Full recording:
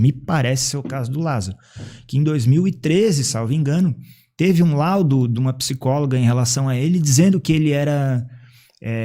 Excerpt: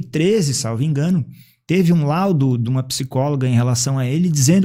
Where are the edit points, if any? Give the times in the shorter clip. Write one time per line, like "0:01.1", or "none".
none